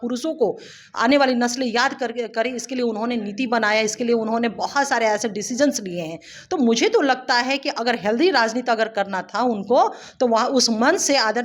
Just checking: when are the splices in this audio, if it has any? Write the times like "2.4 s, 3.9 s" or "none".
none